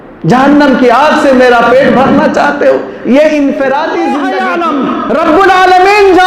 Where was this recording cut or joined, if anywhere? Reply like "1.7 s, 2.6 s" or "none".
4.5 s